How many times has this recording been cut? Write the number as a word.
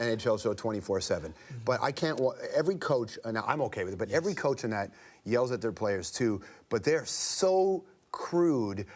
one